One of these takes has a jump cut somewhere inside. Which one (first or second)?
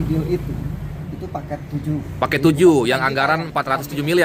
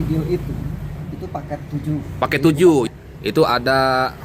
second